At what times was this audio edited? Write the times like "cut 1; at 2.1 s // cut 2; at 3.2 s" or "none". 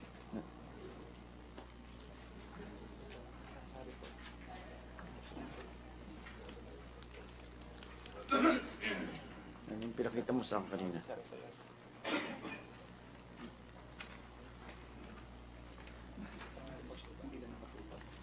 cut 1; at 3.2 s